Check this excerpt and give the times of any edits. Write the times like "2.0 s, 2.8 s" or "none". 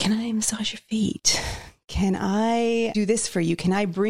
2.9 s